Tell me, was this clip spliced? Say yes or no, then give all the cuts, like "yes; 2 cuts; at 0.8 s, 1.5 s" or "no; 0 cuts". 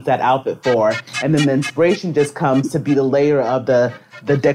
no; 0 cuts